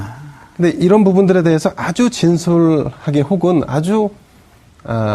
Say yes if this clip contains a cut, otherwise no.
yes